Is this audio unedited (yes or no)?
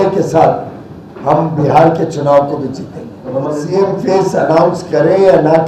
no